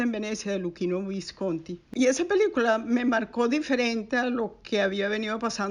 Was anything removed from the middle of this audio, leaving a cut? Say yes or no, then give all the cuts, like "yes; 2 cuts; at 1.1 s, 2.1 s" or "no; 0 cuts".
yes; 1 cut; at 1.8 s